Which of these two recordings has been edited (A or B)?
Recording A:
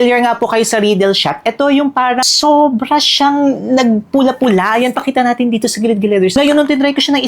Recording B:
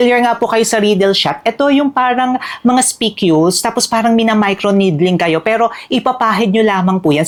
A